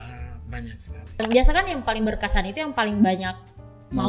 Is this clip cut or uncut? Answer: cut